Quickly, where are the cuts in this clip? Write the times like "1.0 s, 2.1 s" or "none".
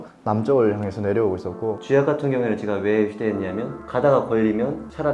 1.8 s